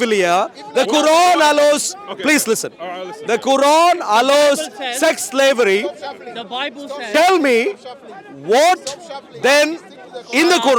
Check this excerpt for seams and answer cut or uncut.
uncut